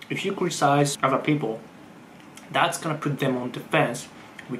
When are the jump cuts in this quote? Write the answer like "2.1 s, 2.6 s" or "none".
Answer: 0.9 s